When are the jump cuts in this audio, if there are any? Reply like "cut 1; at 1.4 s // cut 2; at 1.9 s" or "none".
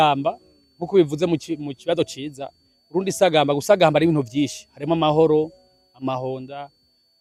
none